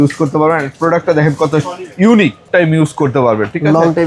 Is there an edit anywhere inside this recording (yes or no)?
yes